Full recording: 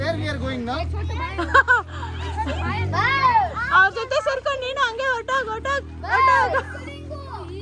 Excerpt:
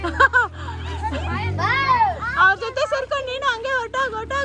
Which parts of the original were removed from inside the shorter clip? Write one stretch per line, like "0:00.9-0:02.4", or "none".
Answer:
none